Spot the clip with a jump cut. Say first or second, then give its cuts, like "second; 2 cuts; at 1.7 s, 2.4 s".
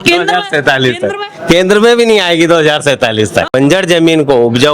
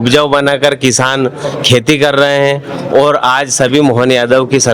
first; 1 cut; at 3.6 s